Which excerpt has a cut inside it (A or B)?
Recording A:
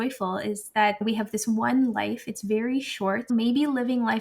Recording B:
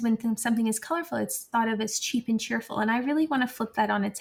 A